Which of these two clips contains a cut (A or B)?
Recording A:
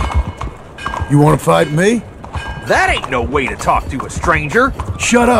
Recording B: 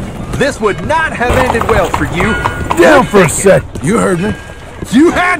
B